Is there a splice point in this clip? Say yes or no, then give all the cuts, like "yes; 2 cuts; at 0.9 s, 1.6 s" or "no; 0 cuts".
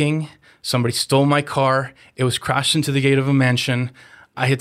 no; 0 cuts